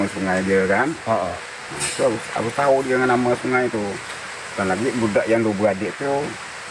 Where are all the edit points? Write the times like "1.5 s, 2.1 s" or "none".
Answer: none

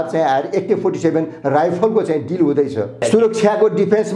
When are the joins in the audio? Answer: 3.0 s

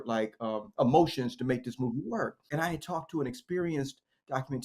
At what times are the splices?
2.4 s

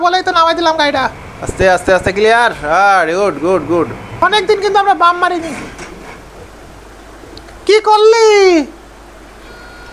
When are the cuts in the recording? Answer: 4.0 s

